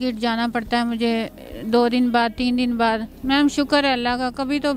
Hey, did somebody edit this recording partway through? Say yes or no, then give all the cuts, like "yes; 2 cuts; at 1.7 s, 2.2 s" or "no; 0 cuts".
yes; 1 cut; at 3.1 s